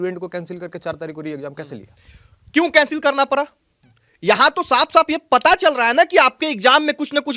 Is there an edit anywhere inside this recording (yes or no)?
no